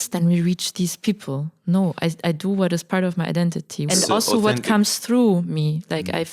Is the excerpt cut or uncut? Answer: cut